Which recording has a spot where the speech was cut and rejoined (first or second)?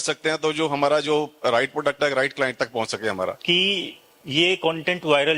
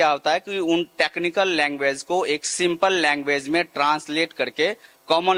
first